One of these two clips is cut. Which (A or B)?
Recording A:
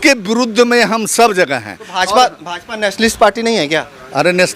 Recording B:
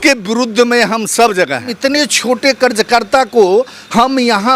B